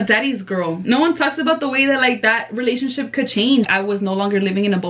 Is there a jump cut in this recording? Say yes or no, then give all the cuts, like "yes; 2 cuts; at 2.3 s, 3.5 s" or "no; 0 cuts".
yes; 2 cuts; at 0.8 s, 3.7 s